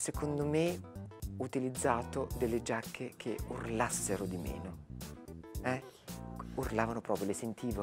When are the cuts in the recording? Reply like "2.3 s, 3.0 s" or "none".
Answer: none